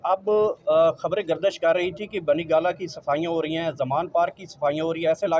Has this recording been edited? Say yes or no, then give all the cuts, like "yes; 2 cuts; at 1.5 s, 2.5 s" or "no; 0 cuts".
no; 0 cuts